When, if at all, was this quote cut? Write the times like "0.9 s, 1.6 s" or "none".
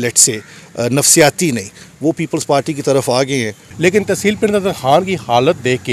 3.6 s

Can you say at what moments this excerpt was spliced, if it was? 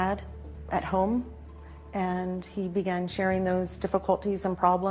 3.2 s

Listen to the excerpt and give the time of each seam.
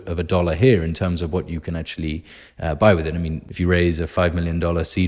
3.4 s

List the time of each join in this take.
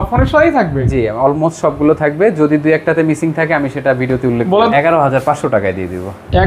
4.7 s

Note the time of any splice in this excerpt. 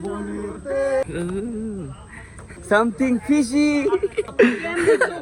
1.0 s, 2.5 s, 4.3 s

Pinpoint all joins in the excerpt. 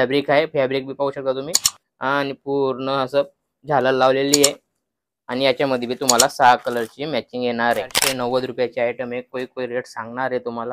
8.0 s

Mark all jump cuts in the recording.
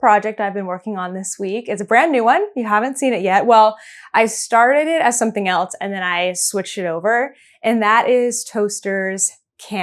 none

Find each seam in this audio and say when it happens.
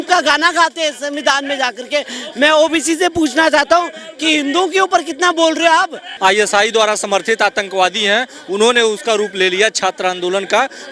6.0 s

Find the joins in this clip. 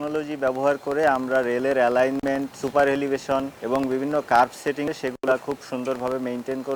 2.6 s, 3.5 s, 4.9 s

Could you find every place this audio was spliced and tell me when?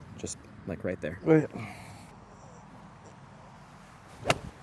2.1 s

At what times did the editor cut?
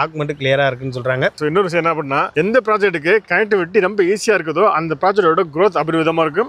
1.4 s

